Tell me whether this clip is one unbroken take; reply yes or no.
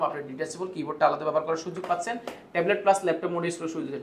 yes